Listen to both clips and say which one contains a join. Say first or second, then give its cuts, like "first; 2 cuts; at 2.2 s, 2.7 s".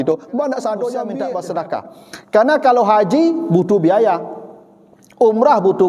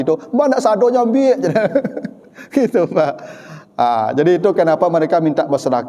first; 1 cut; at 1.2 s